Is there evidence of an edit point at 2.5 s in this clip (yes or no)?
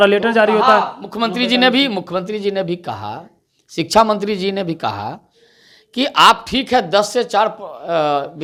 no